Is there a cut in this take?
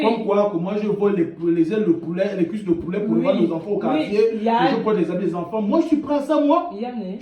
no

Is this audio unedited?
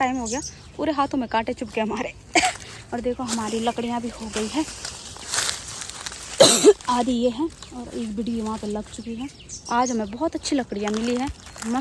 yes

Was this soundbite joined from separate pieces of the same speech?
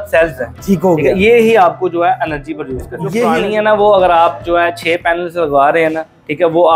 yes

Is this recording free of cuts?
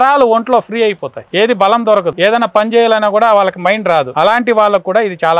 no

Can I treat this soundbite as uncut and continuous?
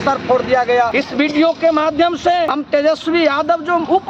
no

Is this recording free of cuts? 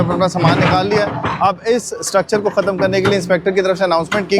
yes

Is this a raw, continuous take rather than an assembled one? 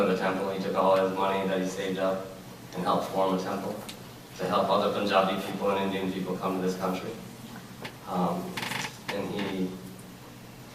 no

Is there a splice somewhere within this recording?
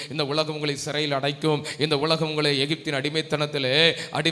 no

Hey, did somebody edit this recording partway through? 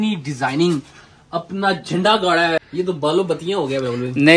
yes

